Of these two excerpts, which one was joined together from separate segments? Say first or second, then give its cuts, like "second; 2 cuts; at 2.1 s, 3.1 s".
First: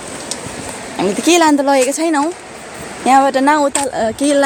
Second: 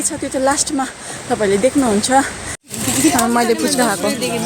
second; 1 cut; at 2.6 s